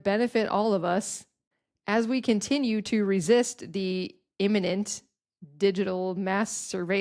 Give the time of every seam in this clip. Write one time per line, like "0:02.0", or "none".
none